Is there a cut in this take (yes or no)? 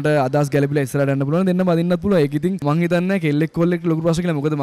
yes